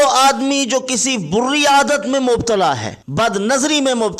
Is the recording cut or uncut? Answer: cut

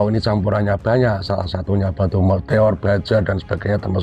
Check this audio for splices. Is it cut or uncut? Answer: uncut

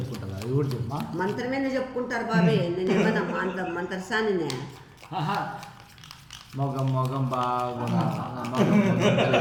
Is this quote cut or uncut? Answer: uncut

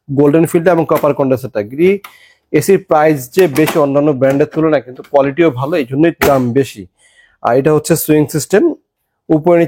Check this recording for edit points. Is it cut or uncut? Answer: uncut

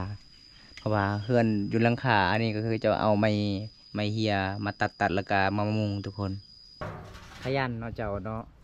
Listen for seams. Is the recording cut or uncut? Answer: cut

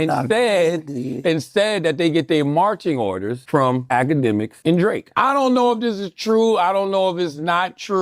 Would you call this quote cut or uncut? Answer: cut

